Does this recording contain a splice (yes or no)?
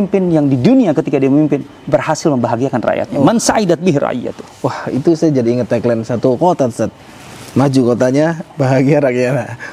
no